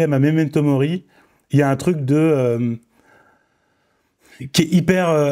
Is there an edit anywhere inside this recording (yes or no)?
no